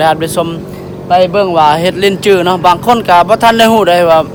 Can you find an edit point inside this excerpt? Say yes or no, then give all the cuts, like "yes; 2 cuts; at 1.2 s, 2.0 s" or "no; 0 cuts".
no; 0 cuts